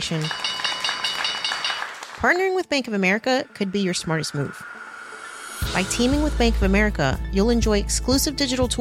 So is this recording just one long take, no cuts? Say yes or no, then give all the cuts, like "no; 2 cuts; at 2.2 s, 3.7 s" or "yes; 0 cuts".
yes; 0 cuts